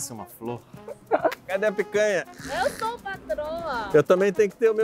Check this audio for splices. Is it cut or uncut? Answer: cut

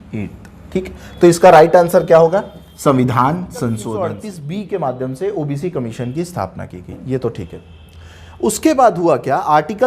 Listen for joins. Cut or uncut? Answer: cut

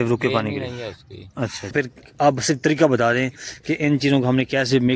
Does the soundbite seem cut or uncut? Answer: cut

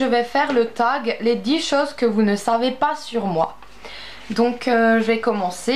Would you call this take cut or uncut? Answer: uncut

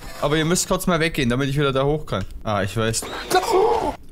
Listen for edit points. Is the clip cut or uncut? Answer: cut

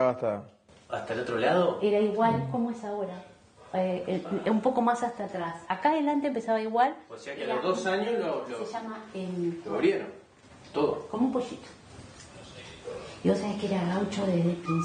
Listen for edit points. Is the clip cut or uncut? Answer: uncut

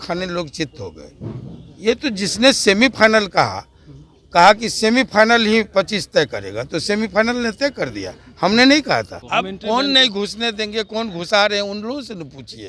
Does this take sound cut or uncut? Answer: cut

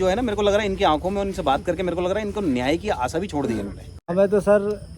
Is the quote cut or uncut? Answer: cut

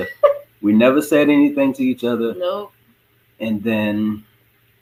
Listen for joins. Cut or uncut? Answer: uncut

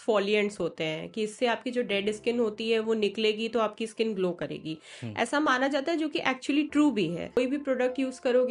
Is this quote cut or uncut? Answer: cut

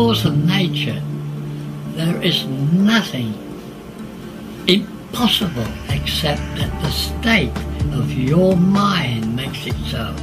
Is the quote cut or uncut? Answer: uncut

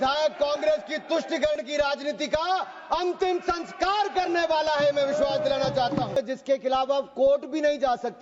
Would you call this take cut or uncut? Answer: uncut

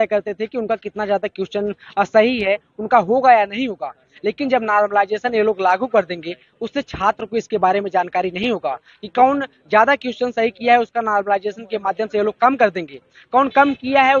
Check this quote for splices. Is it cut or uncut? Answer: uncut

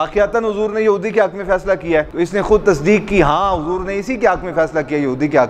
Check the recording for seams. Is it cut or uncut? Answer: uncut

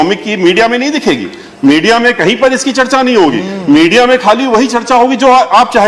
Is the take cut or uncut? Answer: uncut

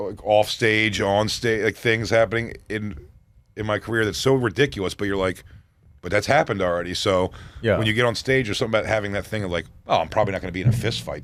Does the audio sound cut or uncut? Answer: uncut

